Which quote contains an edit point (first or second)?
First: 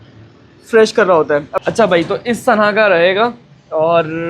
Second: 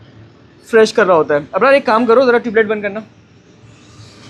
first